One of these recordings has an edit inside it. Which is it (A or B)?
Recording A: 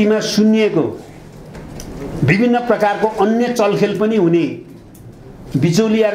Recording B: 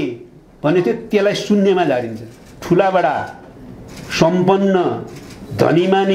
B